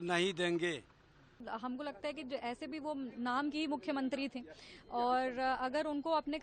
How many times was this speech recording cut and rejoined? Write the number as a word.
one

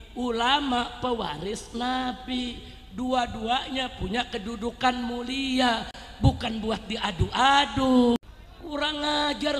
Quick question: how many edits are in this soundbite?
one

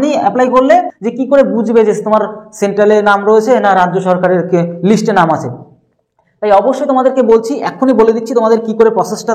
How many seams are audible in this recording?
one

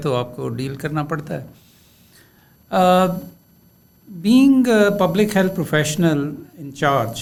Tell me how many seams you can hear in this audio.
zero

